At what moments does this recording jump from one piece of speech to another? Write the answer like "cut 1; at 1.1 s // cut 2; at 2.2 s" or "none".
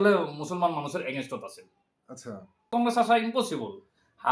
cut 1; at 2.7 s